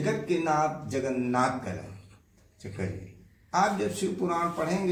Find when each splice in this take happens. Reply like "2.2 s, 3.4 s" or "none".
none